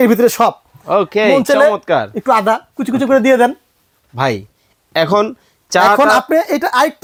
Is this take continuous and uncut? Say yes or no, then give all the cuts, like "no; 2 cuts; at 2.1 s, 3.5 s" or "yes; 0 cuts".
yes; 0 cuts